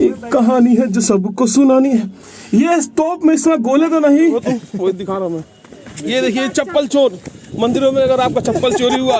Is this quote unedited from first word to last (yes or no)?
no